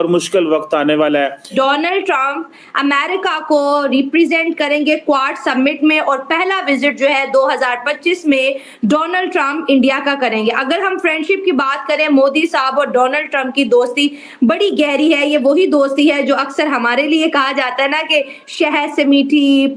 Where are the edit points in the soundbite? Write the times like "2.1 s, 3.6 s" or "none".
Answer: 1.5 s